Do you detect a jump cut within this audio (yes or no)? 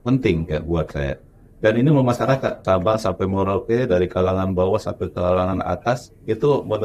yes